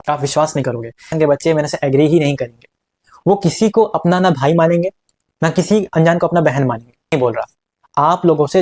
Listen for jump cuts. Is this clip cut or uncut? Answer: cut